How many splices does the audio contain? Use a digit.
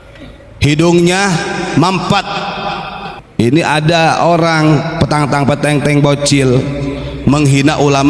1